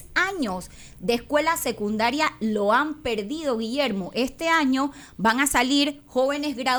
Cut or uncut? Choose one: uncut